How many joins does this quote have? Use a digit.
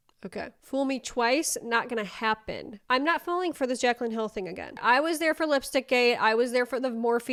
0